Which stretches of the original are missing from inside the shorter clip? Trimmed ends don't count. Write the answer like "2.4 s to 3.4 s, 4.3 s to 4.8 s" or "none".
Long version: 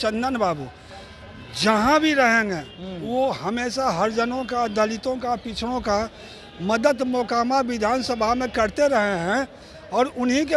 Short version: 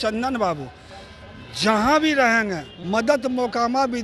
2.7 s to 6.4 s

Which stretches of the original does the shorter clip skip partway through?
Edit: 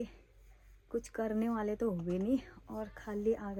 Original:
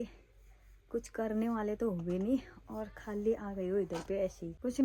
none

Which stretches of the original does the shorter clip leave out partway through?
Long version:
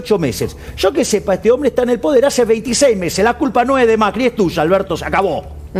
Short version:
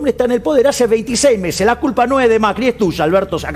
none

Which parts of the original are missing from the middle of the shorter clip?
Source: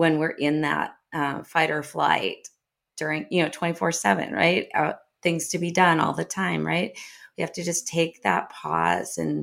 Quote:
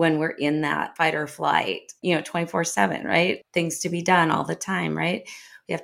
0.9 s to 1.5 s, 2.5 s to 3.2 s, 4.7 s to 5.1 s

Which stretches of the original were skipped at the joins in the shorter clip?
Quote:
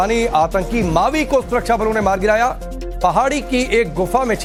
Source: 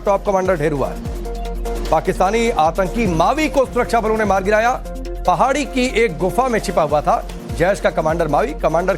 none

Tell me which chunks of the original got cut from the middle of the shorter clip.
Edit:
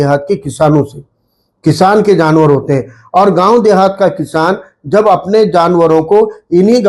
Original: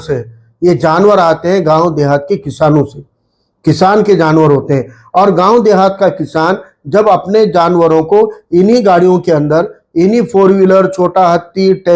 none

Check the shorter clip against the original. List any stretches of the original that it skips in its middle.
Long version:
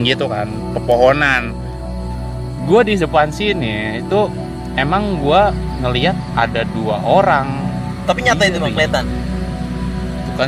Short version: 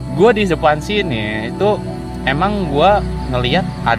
none

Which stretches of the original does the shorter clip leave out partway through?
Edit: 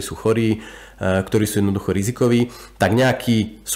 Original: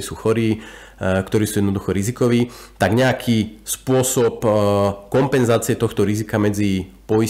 none

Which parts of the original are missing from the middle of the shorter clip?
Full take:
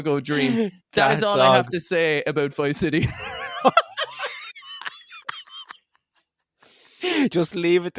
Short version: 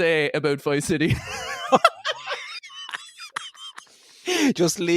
5.9 s to 6.8 s

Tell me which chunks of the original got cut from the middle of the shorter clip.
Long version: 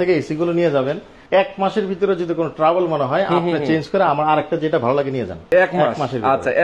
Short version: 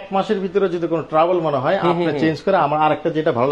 none

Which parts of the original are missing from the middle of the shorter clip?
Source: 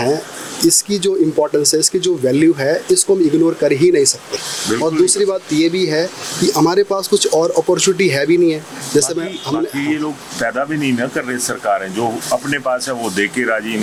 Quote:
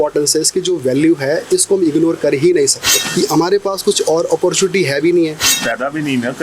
4.4 s to 6.2 s, 8.8 s to 10.3 s

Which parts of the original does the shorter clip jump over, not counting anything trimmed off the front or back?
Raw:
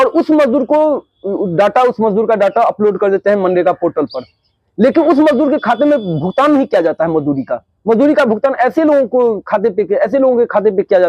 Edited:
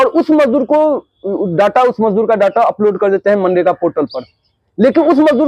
none

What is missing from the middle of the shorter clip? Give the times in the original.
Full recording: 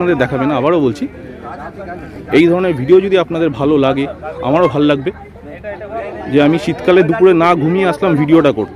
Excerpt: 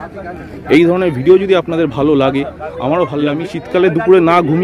5.2 s to 6.7 s

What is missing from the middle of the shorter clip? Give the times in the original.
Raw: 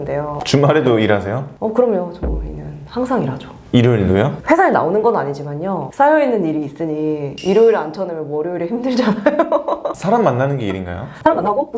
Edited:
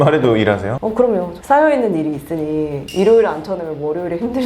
1.6 s to 5.4 s

